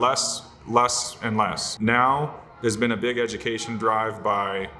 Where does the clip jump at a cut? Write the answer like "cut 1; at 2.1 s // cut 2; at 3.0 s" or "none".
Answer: cut 1; at 1.6 s